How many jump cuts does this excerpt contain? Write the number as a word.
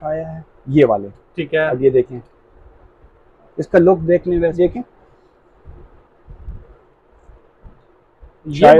one